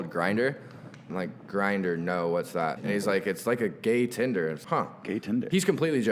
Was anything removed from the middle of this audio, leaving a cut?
yes; 3 cuts; at 1.1 s, 2.8 s, 4.6 s

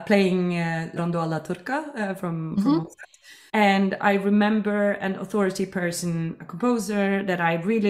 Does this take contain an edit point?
yes; 2 cuts; at 1.0 s, 3.3 s

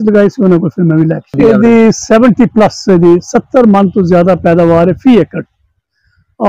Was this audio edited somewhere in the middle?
yes; 1 cut; at 1.4 s

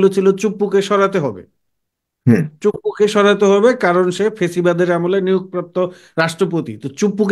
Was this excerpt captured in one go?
yes; 0 cuts

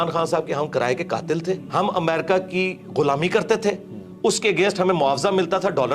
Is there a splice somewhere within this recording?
yes; 1 cut; at 1.2 s

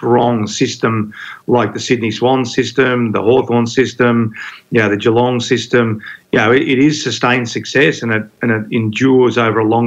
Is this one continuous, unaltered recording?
yes; 0 cuts

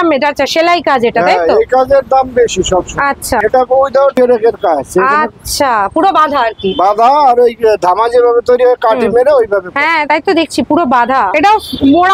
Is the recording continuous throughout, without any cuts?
yes; 0 cuts

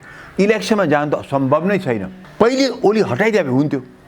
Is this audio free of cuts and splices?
no; 1 cut; at 2.2 s

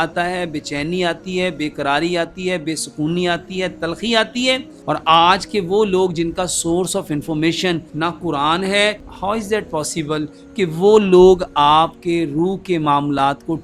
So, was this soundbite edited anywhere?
yes; 3 cuts; at 4.7 s, 7.9 s, 9.1 s

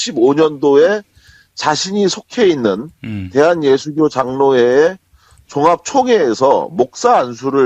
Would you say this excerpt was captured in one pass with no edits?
no; 1 cut; at 3.9 s

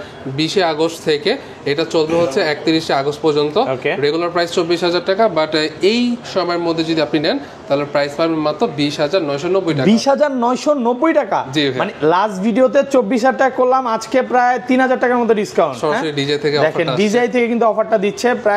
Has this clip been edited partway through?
no; 0 cuts

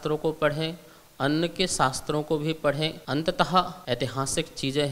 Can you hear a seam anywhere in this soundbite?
yes; 2 cuts; at 3.0 s, 3.8 s

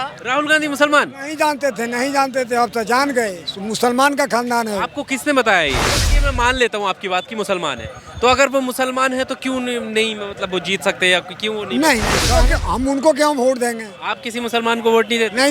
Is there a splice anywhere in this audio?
yes; 2 cuts; at 6.2 s, 12.3 s

